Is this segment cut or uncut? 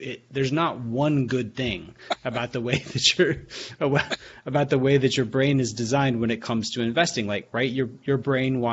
uncut